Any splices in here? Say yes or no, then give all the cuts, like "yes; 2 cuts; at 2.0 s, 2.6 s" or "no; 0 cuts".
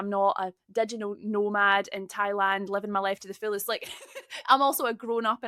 no; 0 cuts